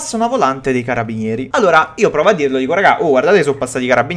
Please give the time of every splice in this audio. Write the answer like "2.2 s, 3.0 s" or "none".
1.4 s